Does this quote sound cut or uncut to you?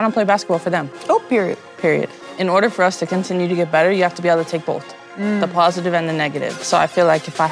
cut